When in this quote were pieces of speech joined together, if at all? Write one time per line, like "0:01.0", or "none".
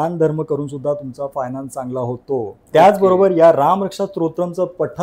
0:02.6